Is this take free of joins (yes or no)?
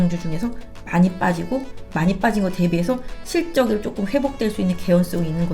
no